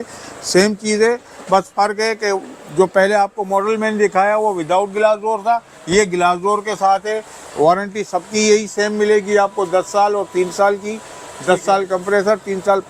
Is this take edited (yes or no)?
no